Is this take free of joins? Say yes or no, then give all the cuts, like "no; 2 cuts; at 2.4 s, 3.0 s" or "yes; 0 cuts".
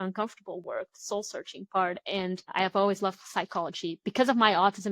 no; 1 cut; at 2.4 s